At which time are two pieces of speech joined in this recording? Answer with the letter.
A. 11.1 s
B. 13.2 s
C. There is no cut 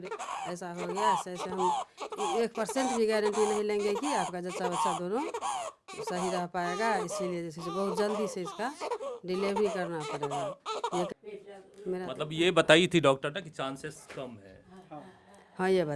A